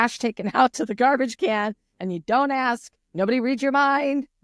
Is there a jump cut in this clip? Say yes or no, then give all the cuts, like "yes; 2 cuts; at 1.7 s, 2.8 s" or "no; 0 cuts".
no; 0 cuts